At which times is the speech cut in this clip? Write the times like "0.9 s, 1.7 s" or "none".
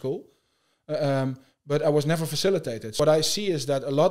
2.9 s